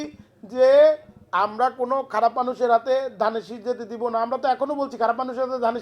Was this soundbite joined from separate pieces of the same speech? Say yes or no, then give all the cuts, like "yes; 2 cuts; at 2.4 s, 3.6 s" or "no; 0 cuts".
no; 0 cuts